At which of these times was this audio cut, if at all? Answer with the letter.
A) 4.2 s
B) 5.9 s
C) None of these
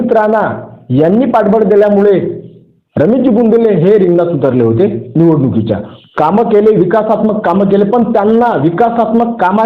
B